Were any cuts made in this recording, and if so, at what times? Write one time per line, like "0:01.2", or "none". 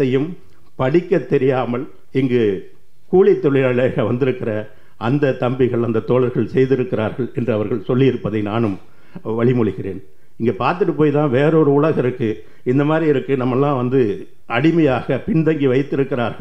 0:01.9